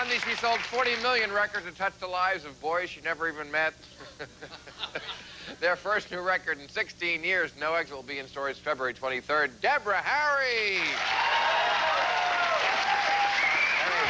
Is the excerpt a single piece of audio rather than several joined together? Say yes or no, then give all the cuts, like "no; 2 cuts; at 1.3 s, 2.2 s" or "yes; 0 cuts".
yes; 0 cuts